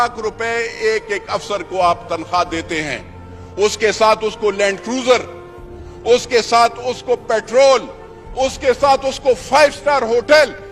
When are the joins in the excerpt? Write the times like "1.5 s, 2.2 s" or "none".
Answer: none